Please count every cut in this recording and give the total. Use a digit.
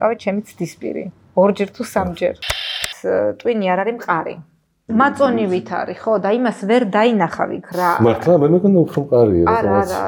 2